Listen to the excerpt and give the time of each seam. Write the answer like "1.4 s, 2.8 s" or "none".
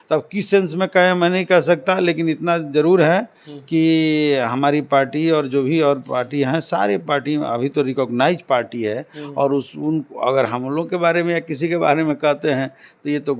none